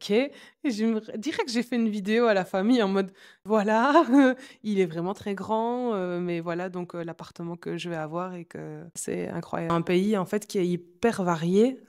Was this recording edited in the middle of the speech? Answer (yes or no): yes